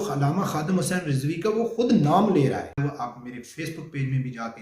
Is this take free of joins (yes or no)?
no